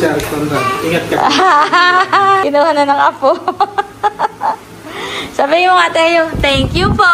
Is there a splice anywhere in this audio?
yes; 1 cut; at 2.4 s

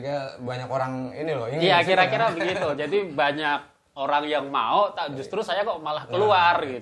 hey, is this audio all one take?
yes; 0 cuts

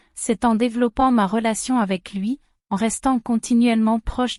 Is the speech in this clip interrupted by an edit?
no; 0 cuts

